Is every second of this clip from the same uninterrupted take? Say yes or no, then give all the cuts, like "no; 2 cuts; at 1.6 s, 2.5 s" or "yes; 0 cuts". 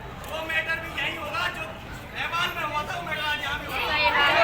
yes; 0 cuts